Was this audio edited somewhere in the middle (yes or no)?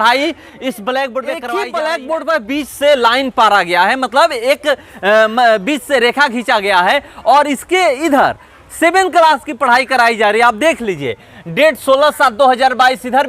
yes